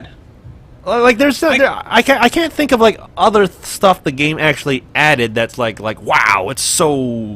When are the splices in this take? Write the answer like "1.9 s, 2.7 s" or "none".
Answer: 3.9 s